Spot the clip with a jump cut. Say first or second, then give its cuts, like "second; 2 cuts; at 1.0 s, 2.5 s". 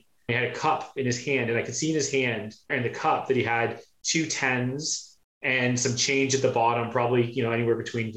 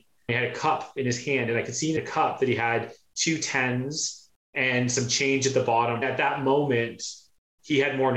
second; 2 cuts; at 2.0 s, 6.0 s